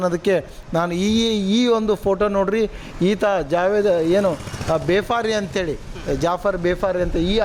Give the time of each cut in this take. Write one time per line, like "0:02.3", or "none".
none

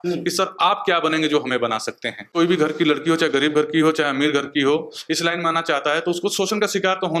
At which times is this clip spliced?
0:02.3

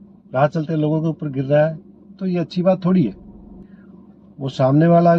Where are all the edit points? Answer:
0:03.5

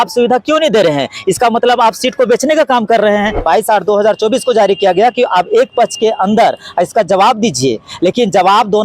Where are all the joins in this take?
0:03.4

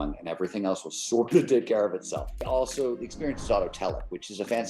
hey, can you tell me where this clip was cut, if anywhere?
0:02.5

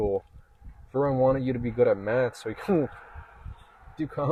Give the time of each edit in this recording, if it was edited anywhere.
none

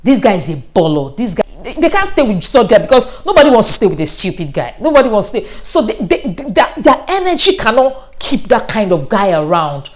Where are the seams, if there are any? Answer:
0:01.4

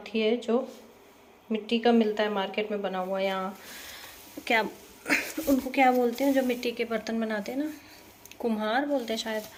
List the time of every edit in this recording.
none

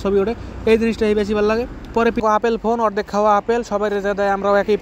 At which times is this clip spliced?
0:02.2

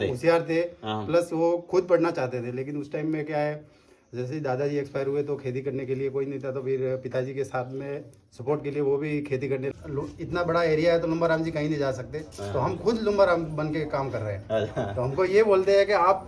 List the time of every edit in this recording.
0:09.7

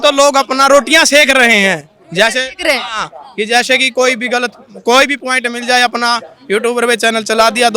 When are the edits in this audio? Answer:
none

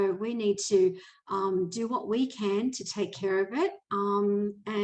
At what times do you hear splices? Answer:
none

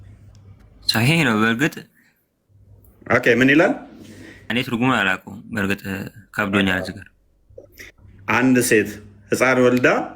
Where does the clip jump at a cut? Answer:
0:04.5

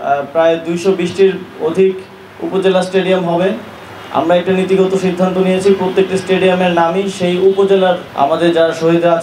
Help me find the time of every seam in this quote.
none

